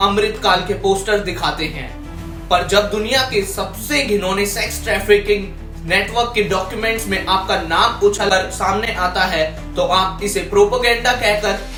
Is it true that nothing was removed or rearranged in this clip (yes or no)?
yes